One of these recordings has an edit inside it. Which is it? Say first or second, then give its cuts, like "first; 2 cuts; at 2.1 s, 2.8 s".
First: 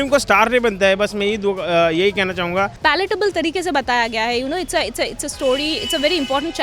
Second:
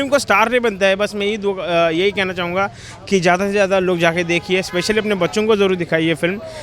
first; 1 cut; at 2.7 s